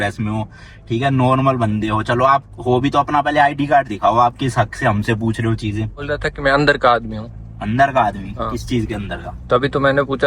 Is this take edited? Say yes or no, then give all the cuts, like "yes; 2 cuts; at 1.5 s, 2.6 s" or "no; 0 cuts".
no; 0 cuts